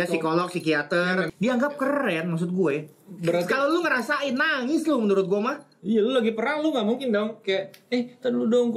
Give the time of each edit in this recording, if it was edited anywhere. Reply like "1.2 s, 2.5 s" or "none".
1.3 s, 5.7 s